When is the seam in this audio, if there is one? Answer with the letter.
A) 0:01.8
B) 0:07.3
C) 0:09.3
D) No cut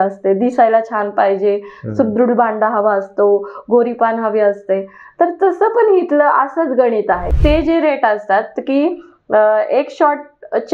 B